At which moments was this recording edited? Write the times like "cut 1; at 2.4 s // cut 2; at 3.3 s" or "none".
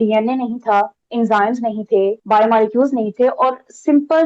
cut 1; at 1.0 s // cut 2; at 2.2 s